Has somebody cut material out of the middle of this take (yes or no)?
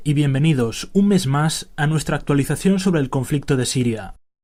no